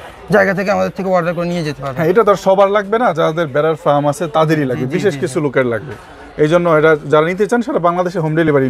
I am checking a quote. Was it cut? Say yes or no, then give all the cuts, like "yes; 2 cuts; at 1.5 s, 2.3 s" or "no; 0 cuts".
no; 0 cuts